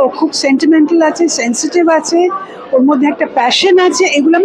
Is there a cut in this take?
no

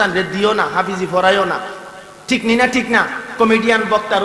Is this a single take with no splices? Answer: yes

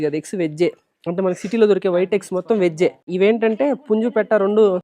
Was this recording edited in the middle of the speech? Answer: yes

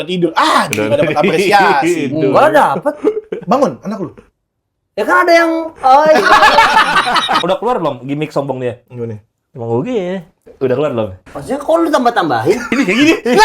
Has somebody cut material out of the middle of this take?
yes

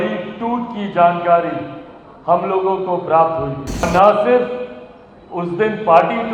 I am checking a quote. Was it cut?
yes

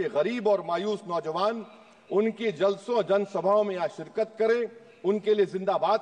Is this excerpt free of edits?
yes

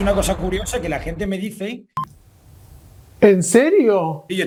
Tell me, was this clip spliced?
no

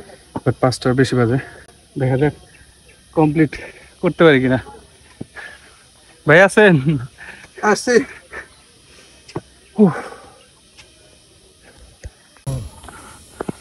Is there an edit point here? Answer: no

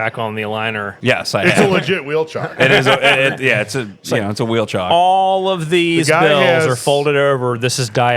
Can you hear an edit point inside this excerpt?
yes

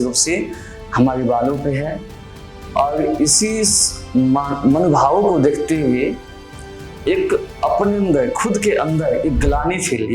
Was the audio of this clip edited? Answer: no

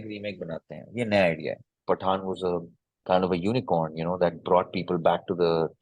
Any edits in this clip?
yes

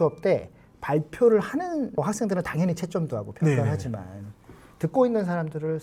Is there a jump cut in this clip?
no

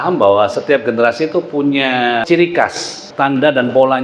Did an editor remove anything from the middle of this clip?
yes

